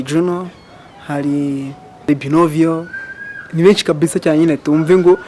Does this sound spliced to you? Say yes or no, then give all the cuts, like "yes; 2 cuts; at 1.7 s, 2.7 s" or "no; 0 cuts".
yes; 1 cut; at 2.1 s